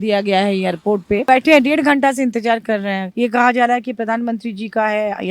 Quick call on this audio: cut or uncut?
cut